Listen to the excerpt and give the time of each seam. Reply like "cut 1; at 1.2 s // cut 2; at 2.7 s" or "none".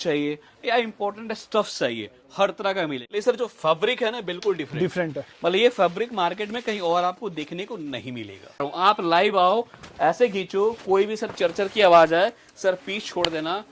cut 1; at 3.0 s // cut 2; at 8.6 s

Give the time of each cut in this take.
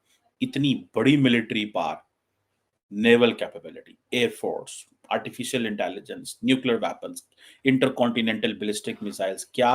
none

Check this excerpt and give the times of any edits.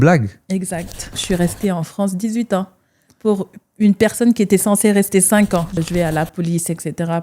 cut 1; at 1.2 s // cut 2; at 5.8 s

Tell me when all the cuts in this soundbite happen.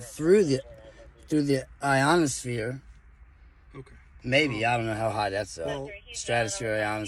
cut 1; at 3.2 s

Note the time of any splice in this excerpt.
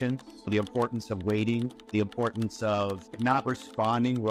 cut 1; at 3.1 s

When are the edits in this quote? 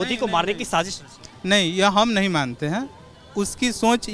none

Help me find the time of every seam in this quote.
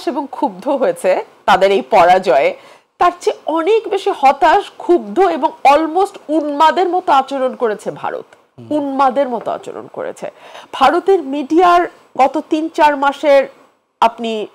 none

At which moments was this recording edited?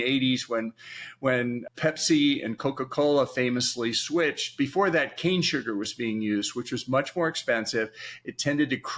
cut 1; at 1.6 s

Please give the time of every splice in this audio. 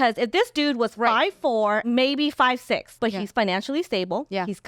cut 1; at 1.8 s // cut 2; at 2.9 s

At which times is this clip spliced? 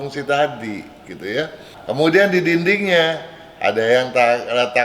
cut 1; at 1.7 s

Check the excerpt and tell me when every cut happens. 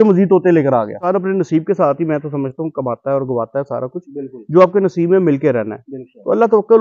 cut 1; at 1.1 s

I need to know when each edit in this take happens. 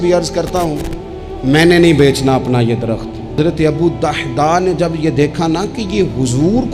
cut 1; at 3.4 s

